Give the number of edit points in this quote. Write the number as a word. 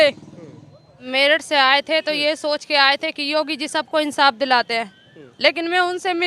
one